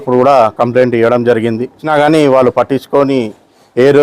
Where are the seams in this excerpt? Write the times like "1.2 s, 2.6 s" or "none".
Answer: 1.8 s